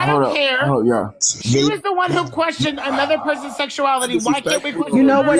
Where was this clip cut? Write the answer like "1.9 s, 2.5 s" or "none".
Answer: none